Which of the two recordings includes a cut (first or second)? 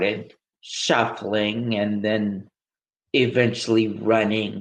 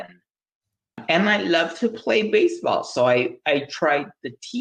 second